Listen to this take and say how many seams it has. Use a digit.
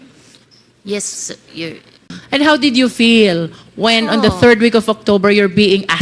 1